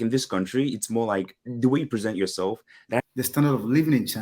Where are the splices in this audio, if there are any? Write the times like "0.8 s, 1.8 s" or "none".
3.0 s

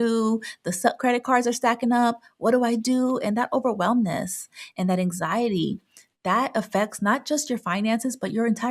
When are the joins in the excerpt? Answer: none

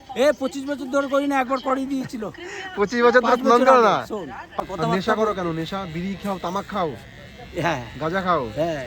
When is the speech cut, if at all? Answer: 4.6 s

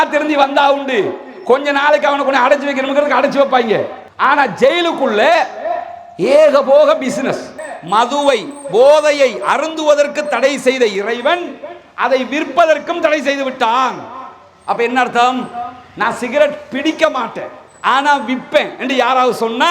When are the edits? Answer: 7.5 s

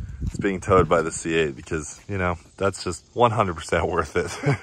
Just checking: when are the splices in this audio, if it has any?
3.0 s

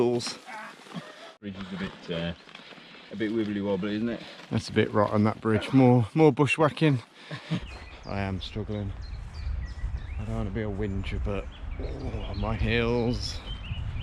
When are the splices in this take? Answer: 1.3 s, 7.6 s

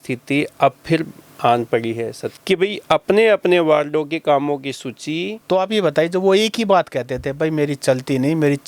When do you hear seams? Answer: 2.3 s, 5.3 s

